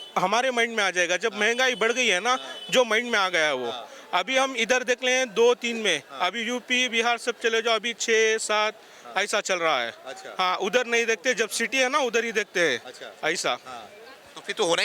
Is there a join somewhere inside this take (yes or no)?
no